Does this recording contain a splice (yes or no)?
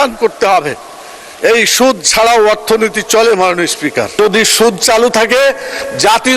yes